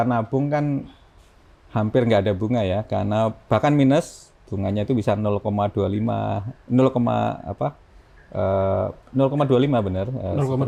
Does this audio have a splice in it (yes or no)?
no